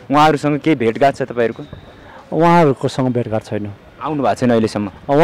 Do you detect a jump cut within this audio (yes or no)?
no